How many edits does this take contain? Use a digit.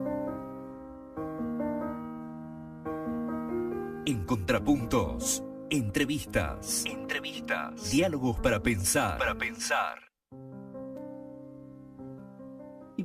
0